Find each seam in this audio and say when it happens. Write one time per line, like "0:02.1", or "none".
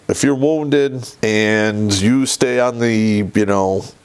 0:01.1